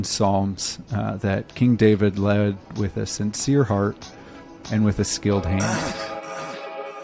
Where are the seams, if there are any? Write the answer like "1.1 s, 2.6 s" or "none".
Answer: 5.7 s